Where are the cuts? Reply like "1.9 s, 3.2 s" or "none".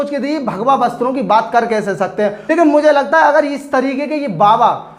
2.4 s